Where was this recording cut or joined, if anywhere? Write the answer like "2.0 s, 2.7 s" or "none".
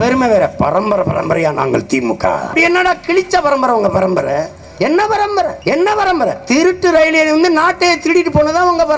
2.5 s, 5.6 s